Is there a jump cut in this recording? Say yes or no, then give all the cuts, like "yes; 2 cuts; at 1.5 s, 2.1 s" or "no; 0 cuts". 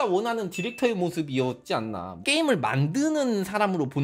yes; 1 cut; at 2.2 s